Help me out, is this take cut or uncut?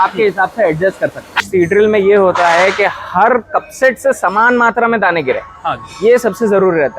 cut